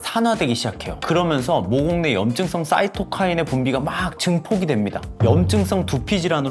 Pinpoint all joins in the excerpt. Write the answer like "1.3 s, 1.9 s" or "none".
5.1 s